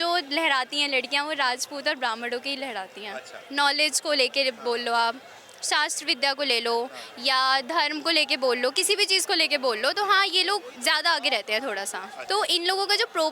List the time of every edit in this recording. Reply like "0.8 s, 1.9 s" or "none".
12.1 s